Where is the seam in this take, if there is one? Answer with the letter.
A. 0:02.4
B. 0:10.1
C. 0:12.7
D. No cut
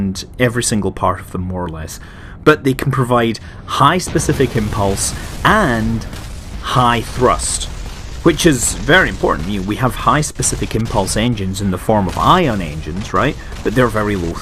D